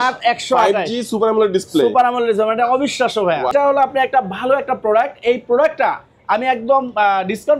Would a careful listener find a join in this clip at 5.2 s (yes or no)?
no